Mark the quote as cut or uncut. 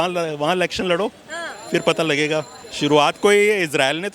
cut